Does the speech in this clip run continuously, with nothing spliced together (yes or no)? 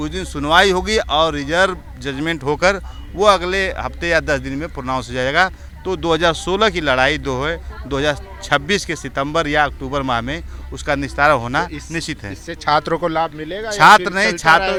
yes